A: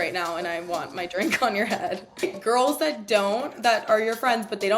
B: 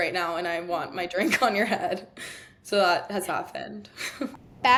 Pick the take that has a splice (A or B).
A